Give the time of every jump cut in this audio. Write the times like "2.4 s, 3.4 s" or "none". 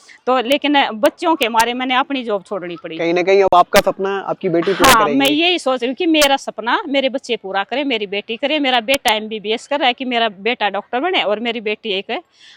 none